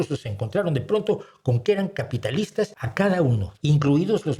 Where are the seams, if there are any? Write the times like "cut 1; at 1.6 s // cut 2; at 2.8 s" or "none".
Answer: cut 1; at 2.8 s // cut 2; at 3.5 s